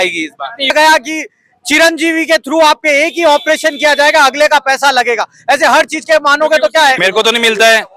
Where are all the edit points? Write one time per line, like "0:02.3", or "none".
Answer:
0:00.7
0:07.0